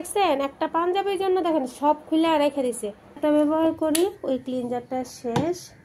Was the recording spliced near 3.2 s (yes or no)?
yes